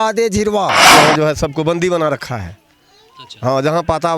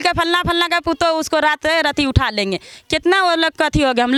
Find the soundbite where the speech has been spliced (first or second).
first